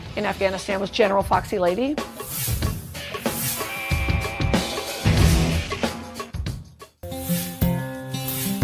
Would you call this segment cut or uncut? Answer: uncut